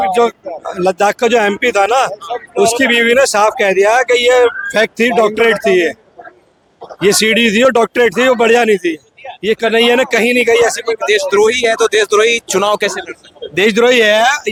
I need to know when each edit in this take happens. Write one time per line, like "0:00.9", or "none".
none